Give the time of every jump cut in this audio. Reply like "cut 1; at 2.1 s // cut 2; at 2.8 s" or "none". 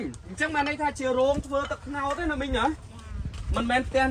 none